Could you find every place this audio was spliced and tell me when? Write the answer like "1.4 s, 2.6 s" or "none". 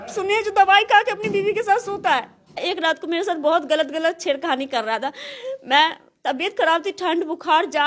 2.6 s